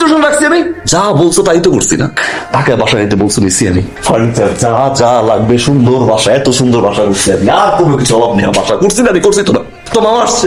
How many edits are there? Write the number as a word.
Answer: zero